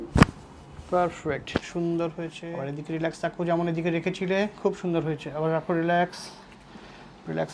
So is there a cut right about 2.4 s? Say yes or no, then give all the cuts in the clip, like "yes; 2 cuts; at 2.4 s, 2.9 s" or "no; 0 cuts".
yes; 1 cut; at 2.4 s